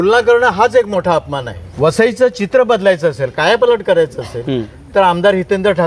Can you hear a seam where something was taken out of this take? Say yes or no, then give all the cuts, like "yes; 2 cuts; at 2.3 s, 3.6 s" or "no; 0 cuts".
yes; 1 cut; at 1.6 s